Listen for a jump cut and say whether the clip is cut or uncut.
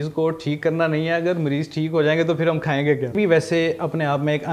cut